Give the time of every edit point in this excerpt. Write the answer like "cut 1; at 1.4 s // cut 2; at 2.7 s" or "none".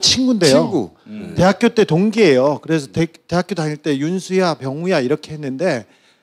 cut 1; at 3.9 s